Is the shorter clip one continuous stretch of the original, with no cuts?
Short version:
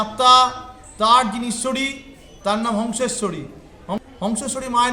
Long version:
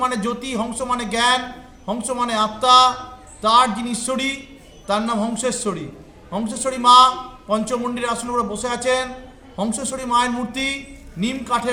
no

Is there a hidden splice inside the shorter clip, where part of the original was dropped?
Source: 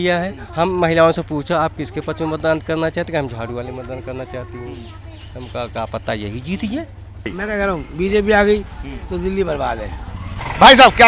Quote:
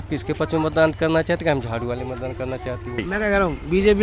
yes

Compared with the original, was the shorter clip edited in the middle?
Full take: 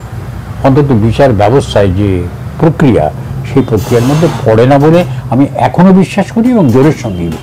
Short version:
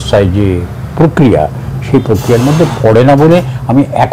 no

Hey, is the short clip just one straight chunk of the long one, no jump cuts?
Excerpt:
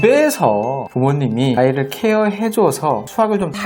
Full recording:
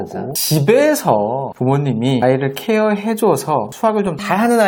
yes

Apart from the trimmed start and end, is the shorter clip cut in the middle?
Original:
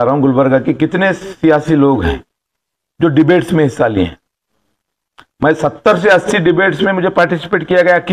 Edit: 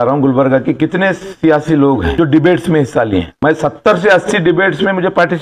yes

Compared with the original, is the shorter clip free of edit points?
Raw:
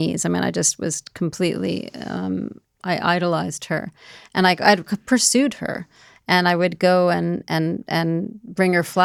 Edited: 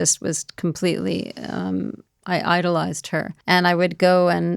no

